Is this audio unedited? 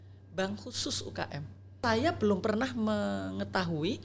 no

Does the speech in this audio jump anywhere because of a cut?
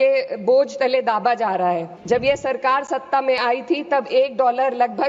yes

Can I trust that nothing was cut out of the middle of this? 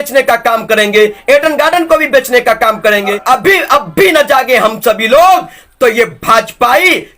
no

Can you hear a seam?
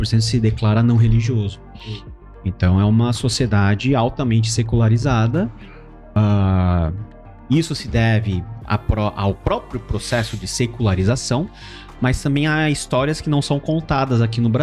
no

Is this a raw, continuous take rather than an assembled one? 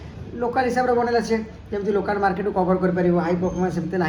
yes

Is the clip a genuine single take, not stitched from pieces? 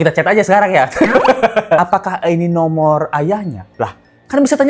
no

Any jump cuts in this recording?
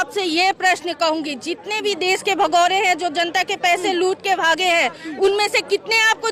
no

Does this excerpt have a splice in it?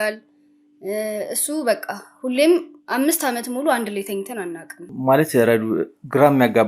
no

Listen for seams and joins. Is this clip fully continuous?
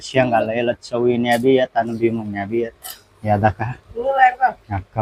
yes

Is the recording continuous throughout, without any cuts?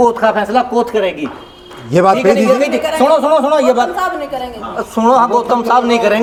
yes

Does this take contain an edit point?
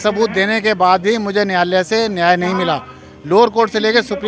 no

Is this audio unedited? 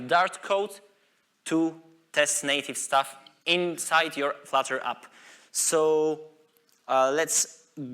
yes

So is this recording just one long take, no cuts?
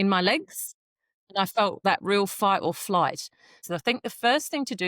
no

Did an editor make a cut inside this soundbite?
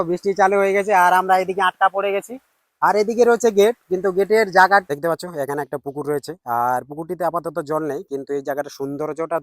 yes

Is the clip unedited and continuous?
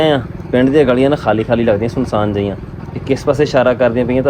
yes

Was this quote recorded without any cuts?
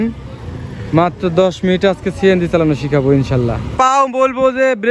no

